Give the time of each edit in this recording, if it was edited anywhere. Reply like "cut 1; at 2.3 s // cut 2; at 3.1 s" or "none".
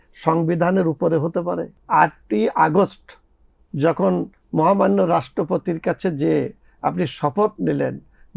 cut 1; at 1.7 s